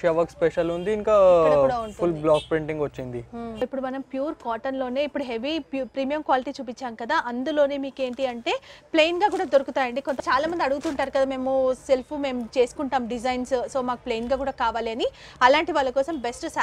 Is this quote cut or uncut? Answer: cut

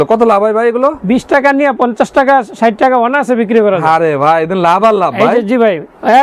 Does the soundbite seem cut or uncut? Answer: uncut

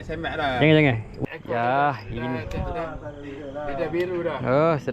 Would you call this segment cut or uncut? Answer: cut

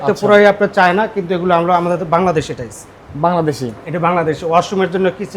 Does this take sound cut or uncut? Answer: uncut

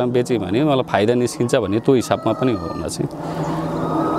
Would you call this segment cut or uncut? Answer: uncut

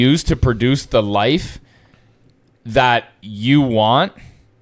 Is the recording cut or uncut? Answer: uncut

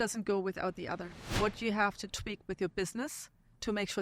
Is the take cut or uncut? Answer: cut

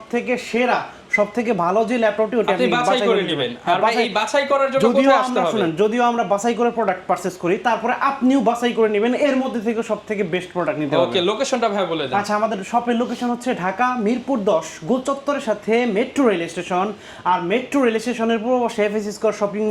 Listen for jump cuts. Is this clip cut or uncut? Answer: uncut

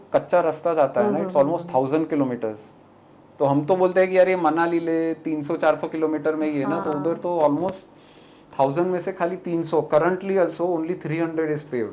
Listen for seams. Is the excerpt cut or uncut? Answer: uncut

